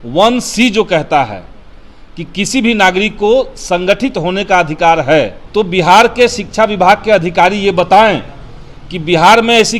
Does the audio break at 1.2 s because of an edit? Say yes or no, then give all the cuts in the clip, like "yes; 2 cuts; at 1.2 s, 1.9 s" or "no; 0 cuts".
no; 1 cut; at 5.4 s